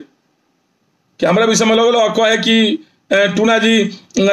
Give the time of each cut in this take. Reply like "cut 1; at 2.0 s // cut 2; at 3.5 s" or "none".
none